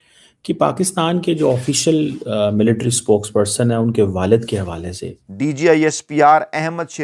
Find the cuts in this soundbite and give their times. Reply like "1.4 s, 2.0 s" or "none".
5.2 s